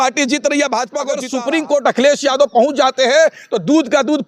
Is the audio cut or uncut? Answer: cut